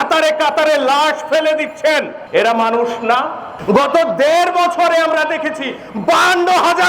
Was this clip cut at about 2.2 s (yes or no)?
yes